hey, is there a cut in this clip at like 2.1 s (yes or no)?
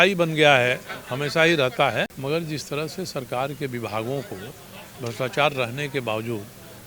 yes